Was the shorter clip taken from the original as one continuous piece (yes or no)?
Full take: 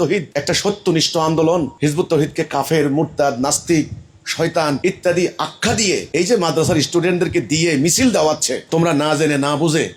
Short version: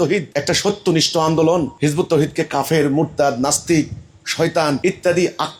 yes